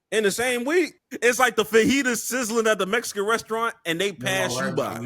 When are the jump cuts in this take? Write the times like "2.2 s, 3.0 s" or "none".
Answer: 1.0 s